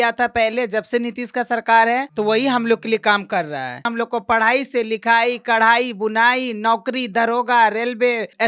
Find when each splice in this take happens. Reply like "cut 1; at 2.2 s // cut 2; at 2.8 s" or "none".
cut 1; at 3.9 s

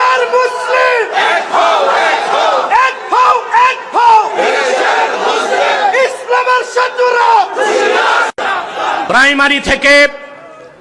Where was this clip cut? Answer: cut 1; at 9.0 s

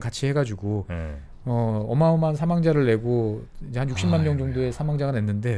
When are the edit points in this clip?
none

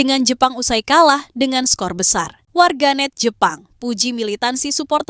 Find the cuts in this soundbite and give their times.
cut 1; at 2.4 s

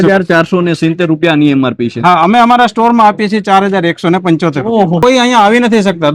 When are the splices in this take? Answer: cut 1; at 5.0 s

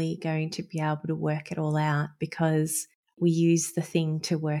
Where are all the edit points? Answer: cut 1; at 3.2 s

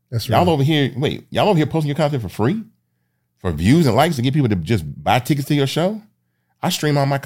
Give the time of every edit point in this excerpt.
none

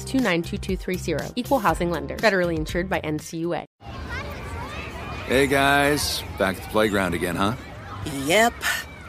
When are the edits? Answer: cut 1; at 3.7 s

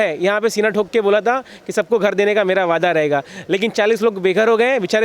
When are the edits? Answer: none

